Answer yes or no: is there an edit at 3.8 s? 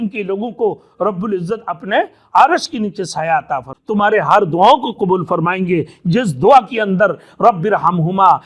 yes